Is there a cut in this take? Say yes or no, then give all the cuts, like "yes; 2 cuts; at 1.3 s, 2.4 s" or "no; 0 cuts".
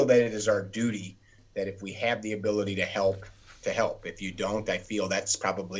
no; 0 cuts